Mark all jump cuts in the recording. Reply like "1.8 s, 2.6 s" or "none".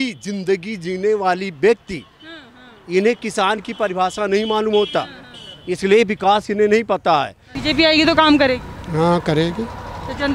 7.5 s